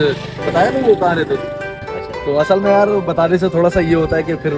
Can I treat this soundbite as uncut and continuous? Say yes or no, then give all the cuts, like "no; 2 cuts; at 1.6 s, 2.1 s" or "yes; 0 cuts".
no; 1 cut; at 1.8 s